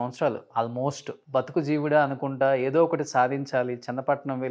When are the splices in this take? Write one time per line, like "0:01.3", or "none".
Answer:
0:01.1